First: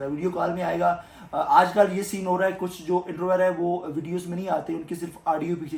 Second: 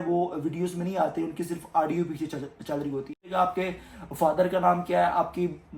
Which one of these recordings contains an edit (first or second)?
second